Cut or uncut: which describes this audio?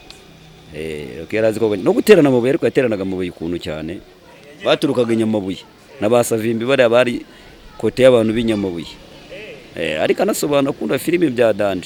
uncut